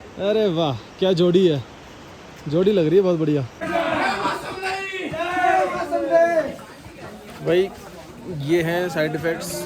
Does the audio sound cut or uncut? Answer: cut